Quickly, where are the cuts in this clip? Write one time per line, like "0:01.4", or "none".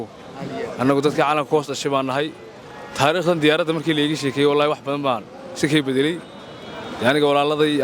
none